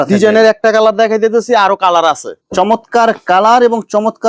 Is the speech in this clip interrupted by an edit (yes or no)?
yes